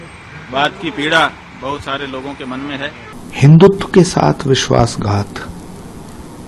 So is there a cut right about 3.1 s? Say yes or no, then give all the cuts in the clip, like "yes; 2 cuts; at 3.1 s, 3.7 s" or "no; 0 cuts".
yes; 1 cut; at 3.1 s